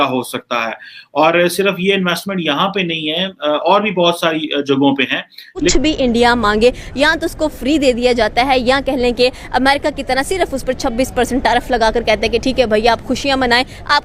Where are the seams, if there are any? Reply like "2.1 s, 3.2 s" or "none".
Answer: 5.7 s